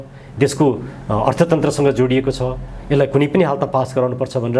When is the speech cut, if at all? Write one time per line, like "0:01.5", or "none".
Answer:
none

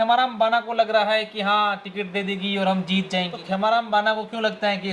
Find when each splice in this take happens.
0:03.4

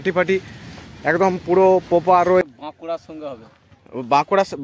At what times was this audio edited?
0:02.4

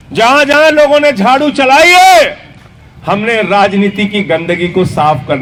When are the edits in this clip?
none

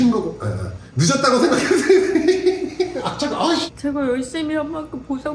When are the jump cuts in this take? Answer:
0:03.7

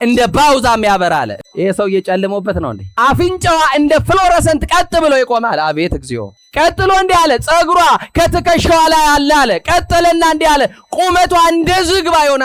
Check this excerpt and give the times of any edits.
0:01.3
0:02.8

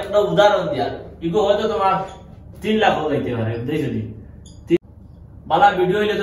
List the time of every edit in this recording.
0:04.8

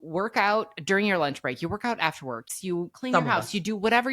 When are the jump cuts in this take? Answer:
0:02.5

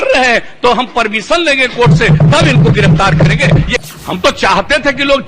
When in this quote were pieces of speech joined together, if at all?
0:03.7

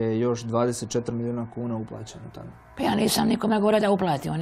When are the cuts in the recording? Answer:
none

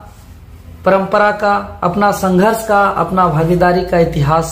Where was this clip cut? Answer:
none

